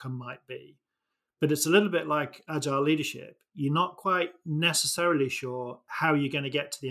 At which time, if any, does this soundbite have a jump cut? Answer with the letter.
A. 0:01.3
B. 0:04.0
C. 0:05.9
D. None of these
D